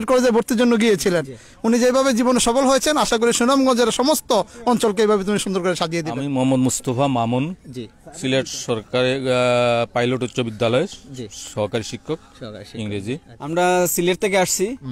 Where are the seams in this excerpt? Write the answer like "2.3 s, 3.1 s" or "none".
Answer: 6.2 s, 13.3 s